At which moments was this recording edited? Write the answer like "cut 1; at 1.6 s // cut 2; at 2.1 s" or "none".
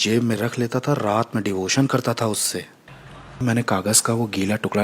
cut 1; at 3.4 s